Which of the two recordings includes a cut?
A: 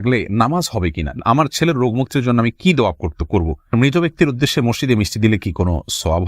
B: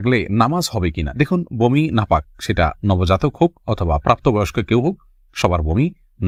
A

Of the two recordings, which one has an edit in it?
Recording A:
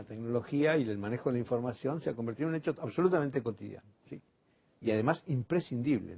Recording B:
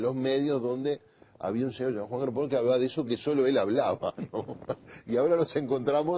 B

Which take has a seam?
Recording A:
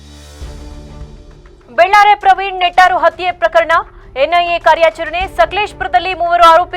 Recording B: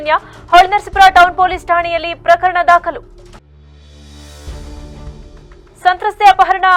A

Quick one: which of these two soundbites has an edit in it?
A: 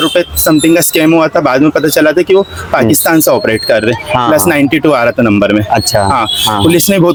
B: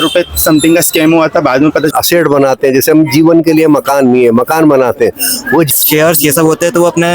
B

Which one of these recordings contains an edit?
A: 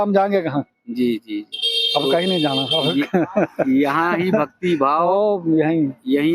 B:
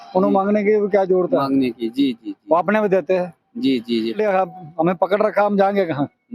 B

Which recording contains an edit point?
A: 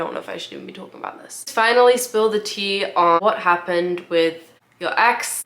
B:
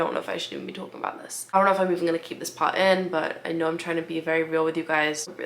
A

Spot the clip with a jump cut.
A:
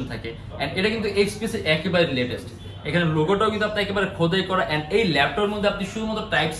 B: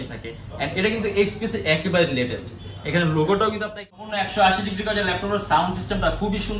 B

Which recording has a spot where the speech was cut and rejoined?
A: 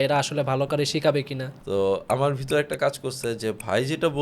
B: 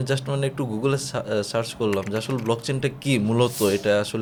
A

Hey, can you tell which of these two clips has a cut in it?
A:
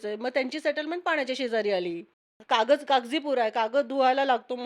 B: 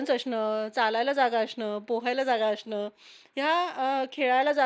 A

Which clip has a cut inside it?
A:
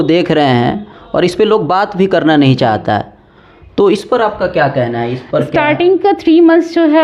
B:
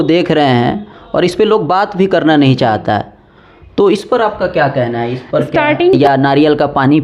B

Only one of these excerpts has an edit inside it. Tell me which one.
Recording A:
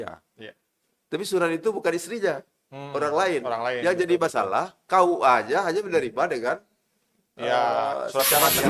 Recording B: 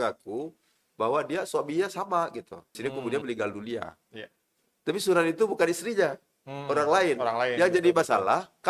B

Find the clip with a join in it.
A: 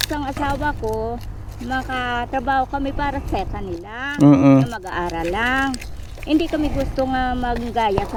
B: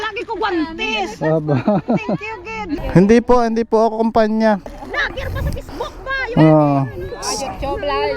B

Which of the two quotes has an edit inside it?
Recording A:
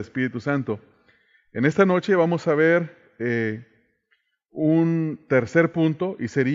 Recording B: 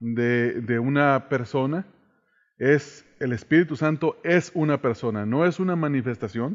A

